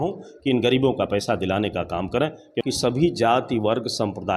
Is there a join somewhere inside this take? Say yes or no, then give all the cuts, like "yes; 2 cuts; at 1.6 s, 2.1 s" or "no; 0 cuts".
yes; 1 cut; at 2.6 s